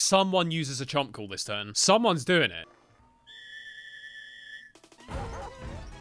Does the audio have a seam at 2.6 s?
yes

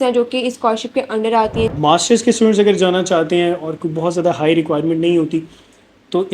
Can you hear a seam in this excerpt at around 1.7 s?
yes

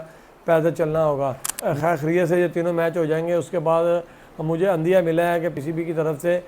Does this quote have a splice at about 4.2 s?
no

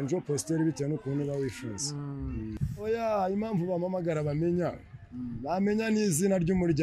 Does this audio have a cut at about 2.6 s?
yes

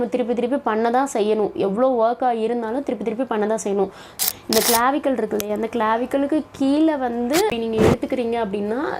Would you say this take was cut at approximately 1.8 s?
no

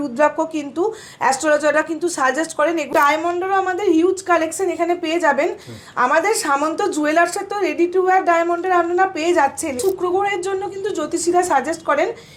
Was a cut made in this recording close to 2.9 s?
yes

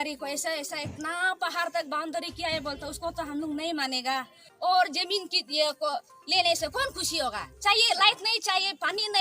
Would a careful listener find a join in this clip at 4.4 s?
yes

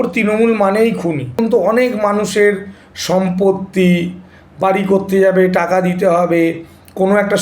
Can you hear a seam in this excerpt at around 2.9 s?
no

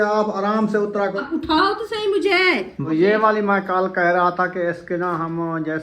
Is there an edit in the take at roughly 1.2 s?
yes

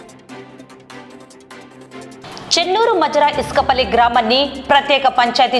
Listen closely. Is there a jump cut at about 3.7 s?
no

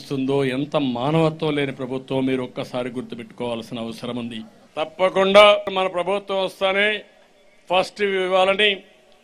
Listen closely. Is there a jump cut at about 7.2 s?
no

